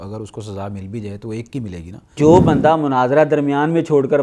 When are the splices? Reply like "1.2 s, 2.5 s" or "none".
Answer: 2.2 s